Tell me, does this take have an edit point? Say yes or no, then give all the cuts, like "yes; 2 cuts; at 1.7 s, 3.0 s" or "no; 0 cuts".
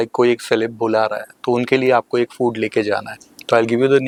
no; 0 cuts